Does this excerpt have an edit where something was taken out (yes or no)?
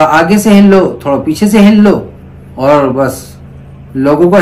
no